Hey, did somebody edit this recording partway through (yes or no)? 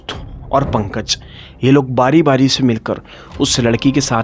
no